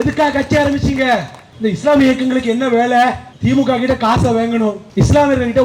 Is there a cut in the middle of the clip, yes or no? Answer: yes